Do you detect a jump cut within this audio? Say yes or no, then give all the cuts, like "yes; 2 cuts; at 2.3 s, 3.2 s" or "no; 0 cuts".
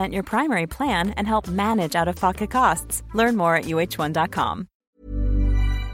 yes; 1 cut; at 4.7 s